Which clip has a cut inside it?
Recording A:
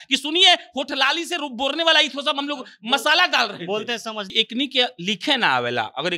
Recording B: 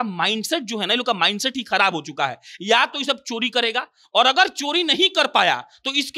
A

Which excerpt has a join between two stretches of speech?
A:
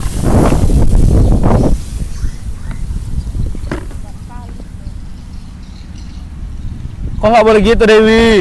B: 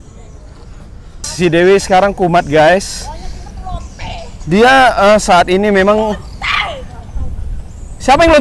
B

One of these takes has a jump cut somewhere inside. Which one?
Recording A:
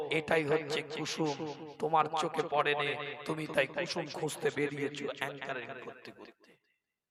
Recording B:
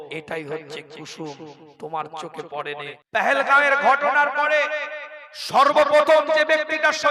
B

